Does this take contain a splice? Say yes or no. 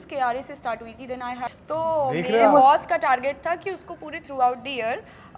yes